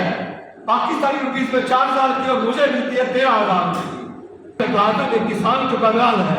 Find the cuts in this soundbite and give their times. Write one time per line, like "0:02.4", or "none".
0:04.6